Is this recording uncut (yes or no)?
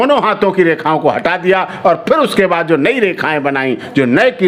yes